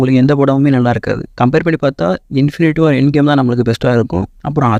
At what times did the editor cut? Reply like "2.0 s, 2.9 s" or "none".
none